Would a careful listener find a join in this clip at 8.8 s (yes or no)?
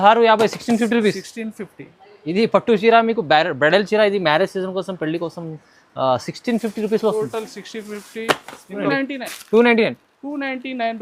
yes